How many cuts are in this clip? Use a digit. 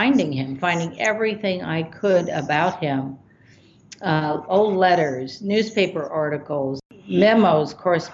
1